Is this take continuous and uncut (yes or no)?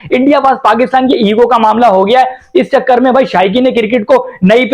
yes